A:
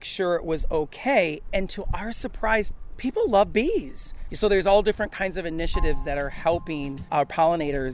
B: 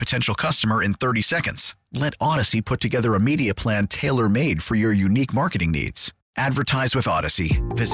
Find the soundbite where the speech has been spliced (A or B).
A